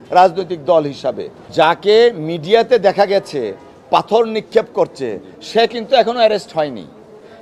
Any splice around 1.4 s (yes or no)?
yes